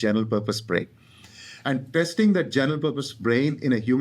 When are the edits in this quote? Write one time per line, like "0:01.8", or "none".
0:01.9